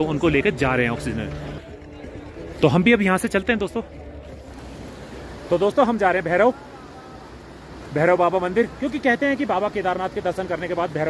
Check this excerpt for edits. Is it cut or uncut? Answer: uncut